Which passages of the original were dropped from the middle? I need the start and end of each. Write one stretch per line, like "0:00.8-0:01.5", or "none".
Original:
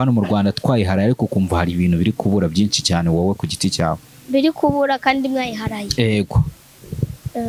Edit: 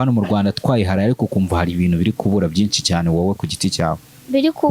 none